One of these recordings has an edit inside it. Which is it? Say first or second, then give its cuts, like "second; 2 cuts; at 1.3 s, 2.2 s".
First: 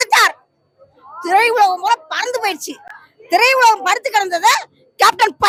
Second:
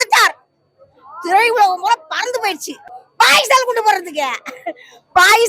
second; 1 cut; at 3.0 s